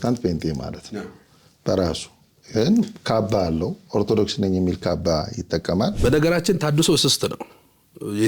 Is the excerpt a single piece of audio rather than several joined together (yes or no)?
no